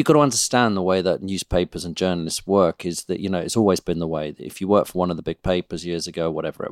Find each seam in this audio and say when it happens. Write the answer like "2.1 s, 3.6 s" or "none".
none